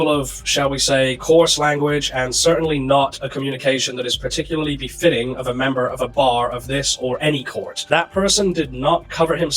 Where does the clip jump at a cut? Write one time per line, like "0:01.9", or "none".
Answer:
0:07.8